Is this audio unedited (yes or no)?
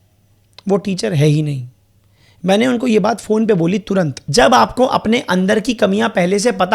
no